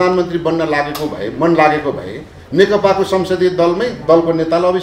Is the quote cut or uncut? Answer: uncut